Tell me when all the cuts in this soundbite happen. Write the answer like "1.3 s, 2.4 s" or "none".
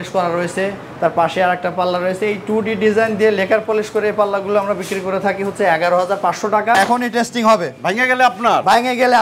6.7 s